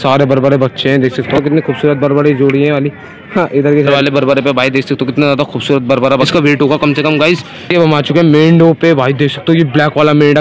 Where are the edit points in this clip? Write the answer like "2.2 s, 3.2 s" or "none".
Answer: 1.3 s, 3.9 s, 6.3 s, 7.6 s